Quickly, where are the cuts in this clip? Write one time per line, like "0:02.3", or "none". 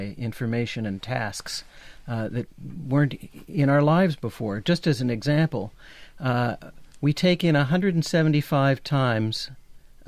0:07.5